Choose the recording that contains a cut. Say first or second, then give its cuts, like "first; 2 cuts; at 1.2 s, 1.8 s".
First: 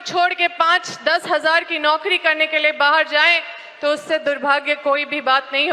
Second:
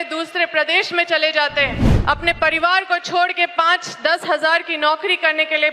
second; 1 cut; at 1.9 s